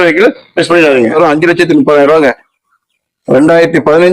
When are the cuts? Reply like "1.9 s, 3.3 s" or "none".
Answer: 1.2 s